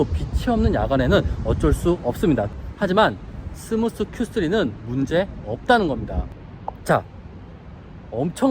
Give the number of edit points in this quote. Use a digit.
2